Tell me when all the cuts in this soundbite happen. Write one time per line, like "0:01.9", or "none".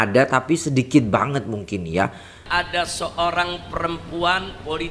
0:02.4